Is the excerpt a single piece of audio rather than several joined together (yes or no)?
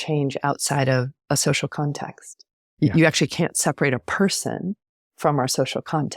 no